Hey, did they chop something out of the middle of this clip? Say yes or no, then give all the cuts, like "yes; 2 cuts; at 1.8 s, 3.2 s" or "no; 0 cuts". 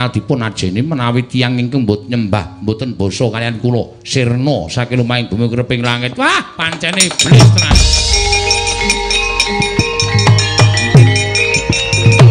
no; 0 cuts